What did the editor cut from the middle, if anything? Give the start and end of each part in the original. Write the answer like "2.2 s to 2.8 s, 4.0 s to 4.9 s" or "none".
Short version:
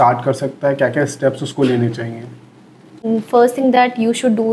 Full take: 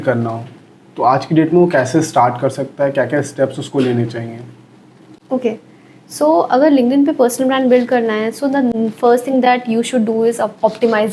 5.2 s to 8.7 s